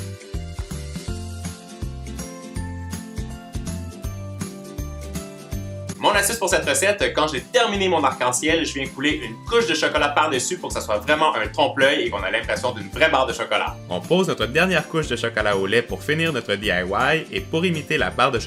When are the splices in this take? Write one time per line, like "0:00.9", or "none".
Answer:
none